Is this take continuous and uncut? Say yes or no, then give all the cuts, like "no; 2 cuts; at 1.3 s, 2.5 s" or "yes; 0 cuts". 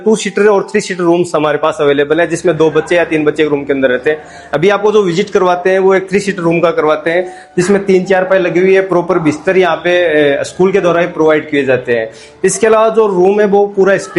yes; 0 cuts